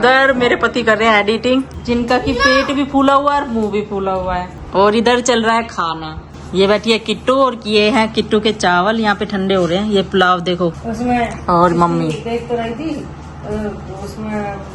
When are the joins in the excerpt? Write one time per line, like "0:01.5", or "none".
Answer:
none